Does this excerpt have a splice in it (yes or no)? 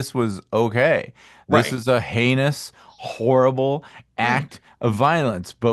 no